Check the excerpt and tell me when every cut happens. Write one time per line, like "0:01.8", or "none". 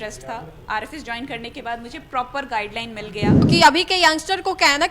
0:03.4